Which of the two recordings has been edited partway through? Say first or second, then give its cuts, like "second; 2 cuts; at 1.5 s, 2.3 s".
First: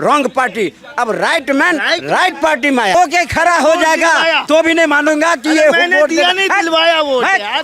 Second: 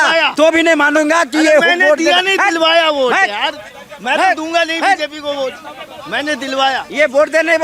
first; 1 cut; at 2.9 s